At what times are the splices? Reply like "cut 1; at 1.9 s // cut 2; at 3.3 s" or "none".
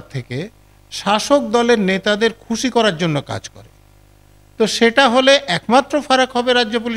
none